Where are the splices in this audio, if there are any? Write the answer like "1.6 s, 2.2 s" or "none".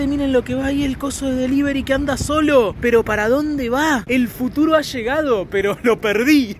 none

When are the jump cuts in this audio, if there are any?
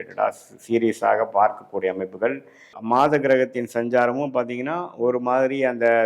2.7 s

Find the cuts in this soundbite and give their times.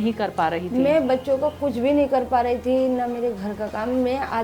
none

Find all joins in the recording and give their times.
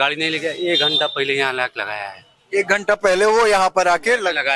none

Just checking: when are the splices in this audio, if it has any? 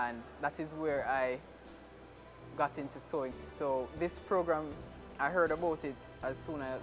3.3 s

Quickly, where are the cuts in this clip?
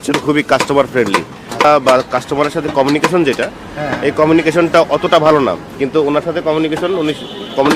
1.6 s

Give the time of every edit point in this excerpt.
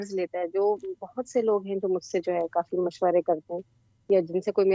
none

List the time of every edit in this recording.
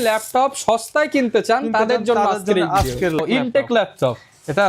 3.2 s

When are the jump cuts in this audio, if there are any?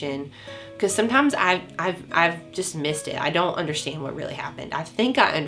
none

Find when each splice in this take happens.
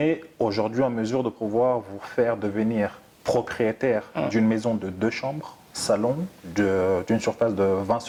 none

